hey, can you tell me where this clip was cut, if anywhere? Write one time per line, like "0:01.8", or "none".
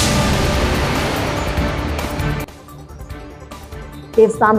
none